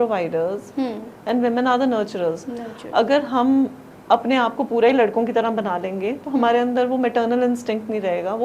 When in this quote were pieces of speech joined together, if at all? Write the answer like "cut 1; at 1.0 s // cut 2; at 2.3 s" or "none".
none